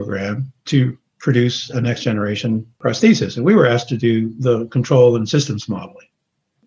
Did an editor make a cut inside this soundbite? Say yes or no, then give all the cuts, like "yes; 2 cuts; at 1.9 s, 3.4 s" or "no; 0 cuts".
yes; 2 cuts; at 1.1 s, 2.7 s